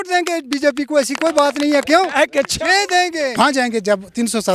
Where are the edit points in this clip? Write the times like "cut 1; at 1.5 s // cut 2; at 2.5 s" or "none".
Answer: cut 1; at 3.3 s